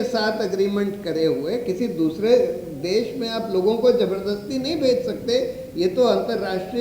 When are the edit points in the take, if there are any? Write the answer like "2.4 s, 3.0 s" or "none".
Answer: none